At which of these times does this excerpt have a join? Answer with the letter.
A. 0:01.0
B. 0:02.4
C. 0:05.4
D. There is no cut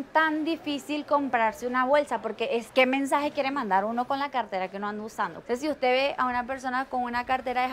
C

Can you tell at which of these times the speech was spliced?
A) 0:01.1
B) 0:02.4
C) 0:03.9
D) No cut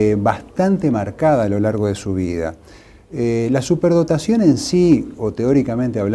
D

